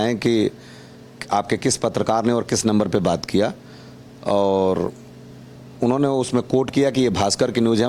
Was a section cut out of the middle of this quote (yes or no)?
no